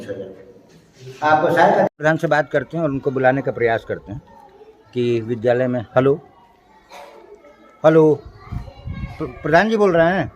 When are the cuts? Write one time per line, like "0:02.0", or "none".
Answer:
0:01.9